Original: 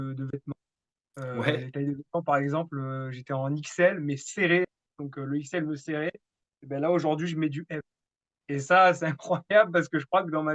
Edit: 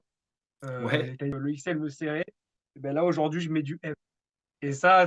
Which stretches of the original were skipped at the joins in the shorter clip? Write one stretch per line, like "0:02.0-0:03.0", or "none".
0:01.9-0:05.2